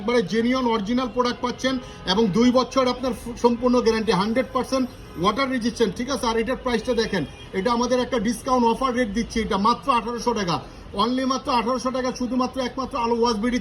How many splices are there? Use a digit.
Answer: 0